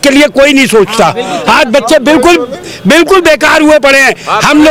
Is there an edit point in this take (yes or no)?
no